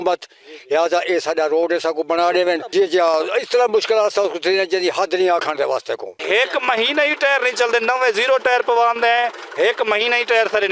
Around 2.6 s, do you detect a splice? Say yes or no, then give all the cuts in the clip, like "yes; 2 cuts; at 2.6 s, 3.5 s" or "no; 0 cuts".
yes; 2 cuts; at 2.6 s, 6.2 s